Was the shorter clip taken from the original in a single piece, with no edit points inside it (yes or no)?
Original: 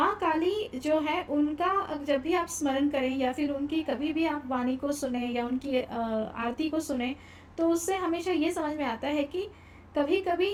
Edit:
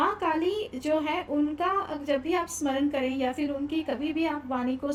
yes